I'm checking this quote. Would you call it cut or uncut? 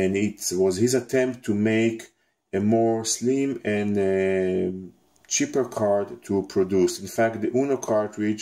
uncut